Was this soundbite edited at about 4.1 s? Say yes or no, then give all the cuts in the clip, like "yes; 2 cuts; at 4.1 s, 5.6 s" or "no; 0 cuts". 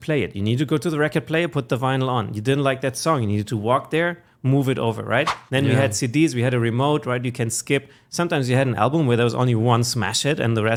no; 0 cuts